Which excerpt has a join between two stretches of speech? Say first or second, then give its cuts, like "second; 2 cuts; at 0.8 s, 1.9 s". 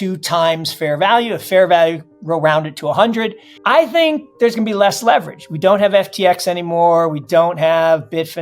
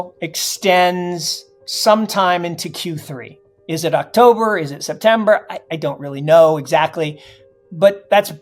first; 1 cut; at 3.5 s